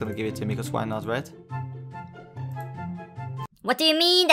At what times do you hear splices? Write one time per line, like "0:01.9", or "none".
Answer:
none